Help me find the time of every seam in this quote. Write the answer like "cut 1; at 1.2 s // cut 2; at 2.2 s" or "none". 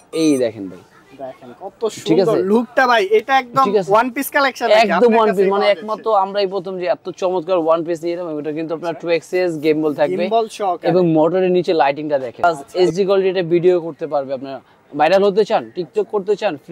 cut 1; at 12.4 s

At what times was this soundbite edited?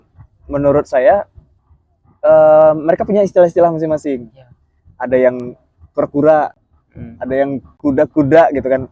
none

